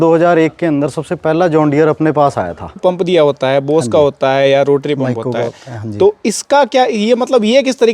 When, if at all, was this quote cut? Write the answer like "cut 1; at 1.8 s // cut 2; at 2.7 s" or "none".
cut 1; at 2.8 s